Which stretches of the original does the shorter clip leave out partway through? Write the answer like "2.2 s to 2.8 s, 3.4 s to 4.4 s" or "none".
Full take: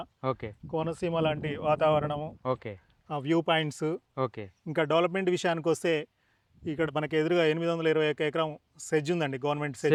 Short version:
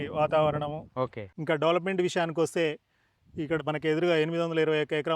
2.7 s to 4.5 s